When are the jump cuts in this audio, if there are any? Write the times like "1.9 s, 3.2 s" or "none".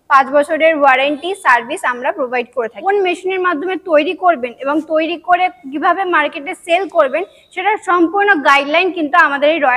2.8 s